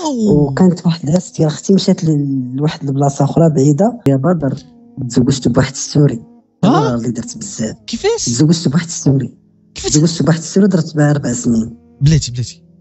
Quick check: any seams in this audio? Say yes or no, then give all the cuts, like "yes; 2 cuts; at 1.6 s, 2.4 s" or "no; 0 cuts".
yes; 1 cut; at 4.1 s